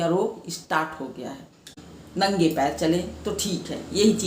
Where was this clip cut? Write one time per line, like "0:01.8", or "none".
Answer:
0:01.7